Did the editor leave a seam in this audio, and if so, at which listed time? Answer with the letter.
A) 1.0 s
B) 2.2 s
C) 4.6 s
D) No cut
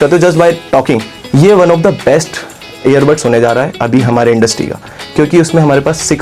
A